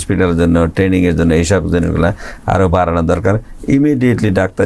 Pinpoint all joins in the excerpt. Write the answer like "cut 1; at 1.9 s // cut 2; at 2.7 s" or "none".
none